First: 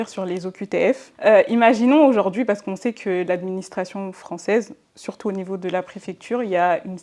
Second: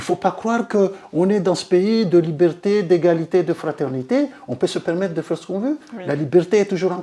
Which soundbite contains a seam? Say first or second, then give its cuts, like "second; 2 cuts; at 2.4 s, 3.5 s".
first; 1 cut; at 1.1 s